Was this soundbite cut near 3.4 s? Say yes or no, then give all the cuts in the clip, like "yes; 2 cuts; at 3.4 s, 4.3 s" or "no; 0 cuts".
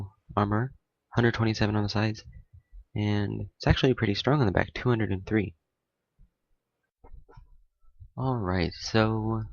yes; 1 cut; at 3.4 s